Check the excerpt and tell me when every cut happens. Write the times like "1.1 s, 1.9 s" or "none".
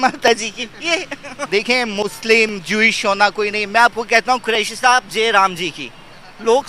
1.5 s

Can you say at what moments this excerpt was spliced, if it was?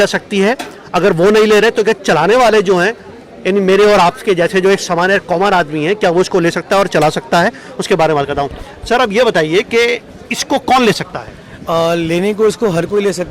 none

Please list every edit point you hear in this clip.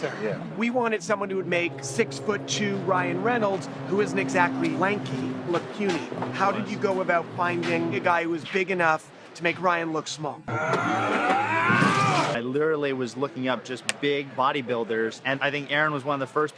10.4 s, 12.3 s

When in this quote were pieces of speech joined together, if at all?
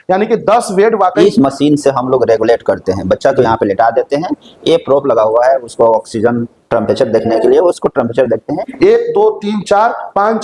1.2 s, 8.7 s

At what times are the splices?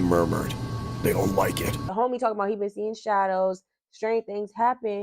1.8 s

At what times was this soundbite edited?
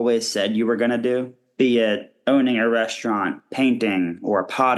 1.4 s, 2.1 s, 3.4 s

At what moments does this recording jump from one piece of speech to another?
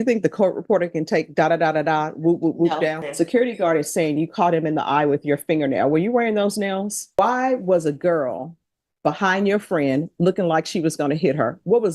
3.0 s, 7.1 s

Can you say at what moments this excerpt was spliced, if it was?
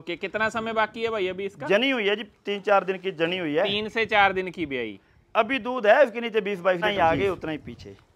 6.8 s

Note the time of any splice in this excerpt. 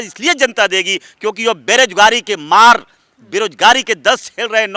none

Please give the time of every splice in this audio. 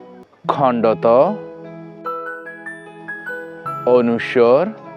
none

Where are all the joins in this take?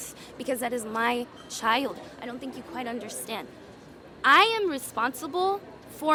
none

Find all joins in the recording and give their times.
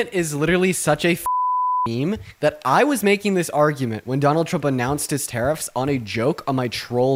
none

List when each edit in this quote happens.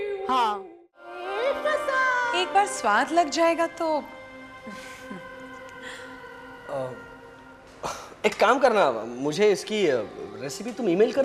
1.2 s

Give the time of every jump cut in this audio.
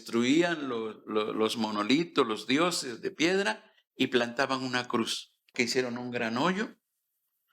5.5 s

